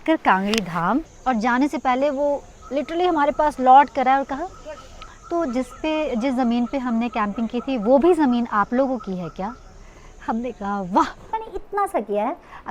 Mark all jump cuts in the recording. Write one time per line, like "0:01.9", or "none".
0:01.1
0:11.3